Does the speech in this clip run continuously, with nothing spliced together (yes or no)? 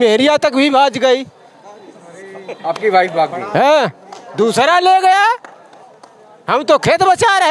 yes